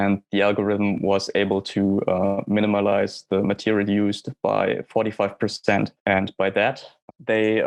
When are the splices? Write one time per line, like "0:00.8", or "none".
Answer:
none